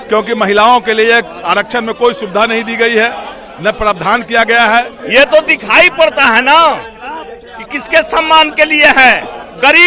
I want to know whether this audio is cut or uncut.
cut